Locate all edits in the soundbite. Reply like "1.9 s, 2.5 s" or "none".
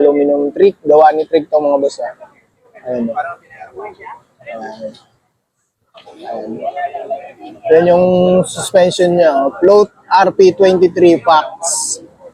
none